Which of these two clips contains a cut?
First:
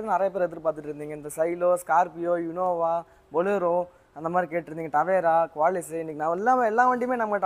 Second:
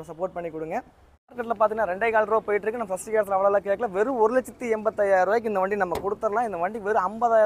second; 1 cut; at 1.4 s

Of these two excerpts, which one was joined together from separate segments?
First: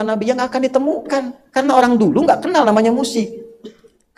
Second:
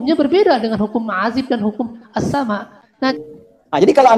second; 1 cut; at 3.1 s

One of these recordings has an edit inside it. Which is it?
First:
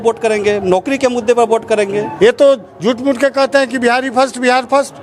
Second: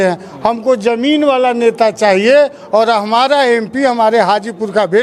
first; 1 cut; at 2.1 s

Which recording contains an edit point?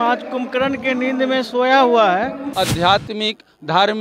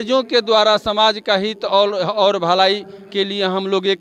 first; 1 cut; at 2.4 s

